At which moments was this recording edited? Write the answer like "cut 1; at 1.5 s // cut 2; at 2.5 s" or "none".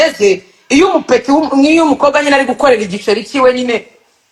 none